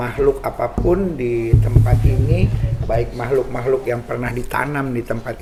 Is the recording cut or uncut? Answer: uncut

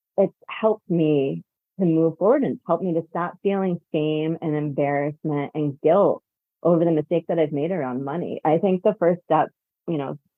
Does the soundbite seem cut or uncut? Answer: uncut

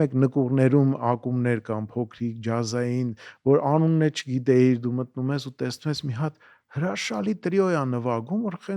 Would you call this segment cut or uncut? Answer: uncut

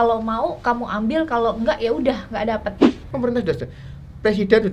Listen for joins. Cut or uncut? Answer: cut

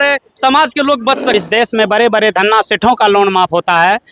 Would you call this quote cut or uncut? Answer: cut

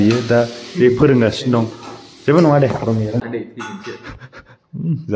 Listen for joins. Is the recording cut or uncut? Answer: cut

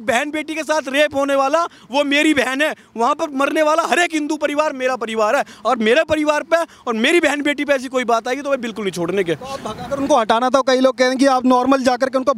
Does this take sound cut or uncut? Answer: uncut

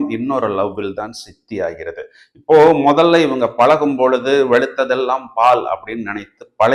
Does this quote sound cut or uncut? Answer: uncut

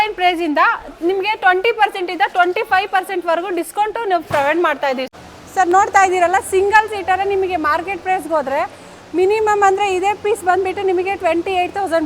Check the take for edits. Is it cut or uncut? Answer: cut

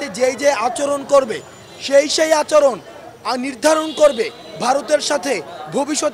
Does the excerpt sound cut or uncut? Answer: uncut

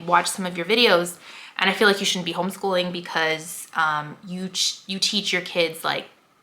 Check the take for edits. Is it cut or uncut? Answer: uncut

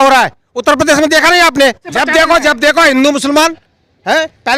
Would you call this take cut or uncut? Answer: cut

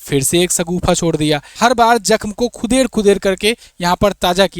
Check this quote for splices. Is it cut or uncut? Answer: cut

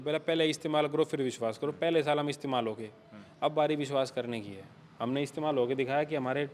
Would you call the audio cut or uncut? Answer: uncut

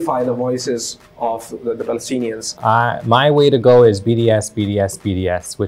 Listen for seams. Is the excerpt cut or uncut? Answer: cut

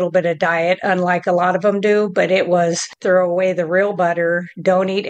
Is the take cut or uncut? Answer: cut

